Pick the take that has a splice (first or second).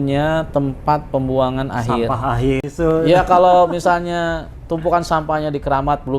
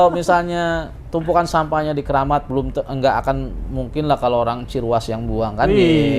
first